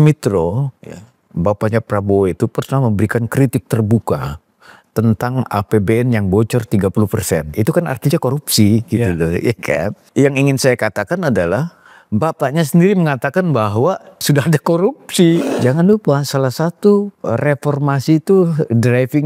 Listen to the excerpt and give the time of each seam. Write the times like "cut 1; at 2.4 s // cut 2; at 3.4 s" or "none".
cut 1; at 10.0 s // cut 2; at 14.2 s // cut 3; at 15.5 s